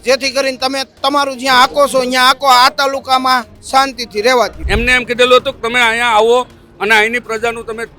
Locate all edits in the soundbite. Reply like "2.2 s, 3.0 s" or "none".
4.6 s